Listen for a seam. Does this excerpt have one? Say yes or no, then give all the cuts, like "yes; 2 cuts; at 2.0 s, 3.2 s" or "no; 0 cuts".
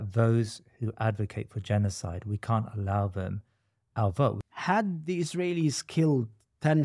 yes; 1 cut; at 4.4 s